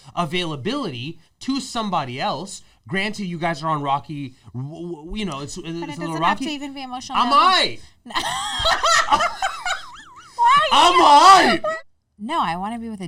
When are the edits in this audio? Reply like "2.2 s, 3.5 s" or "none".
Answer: 11.7 s